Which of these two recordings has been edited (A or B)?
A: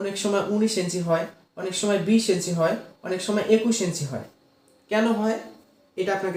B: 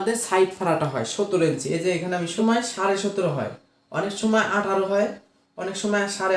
B